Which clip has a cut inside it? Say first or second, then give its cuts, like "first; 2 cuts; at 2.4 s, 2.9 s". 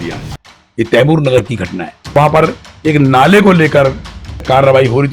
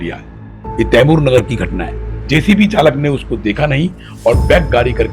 second; 1 cut; at 2.0 s